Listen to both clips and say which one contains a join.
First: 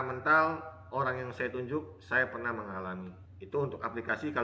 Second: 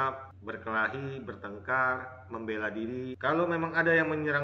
second; 1 cut; at 3.1 s

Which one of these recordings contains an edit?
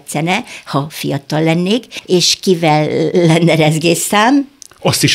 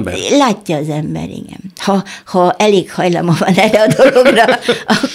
first; 1 cut; at 1.9 s

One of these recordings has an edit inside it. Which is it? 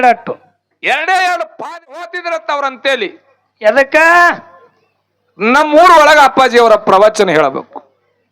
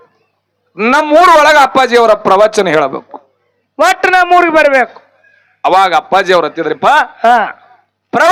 first; 1 cut; at 2.1 s

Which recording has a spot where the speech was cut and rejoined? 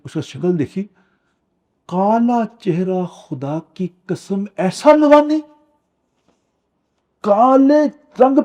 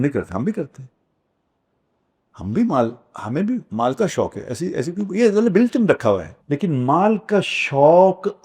second; 1 cut; at 6.3 s

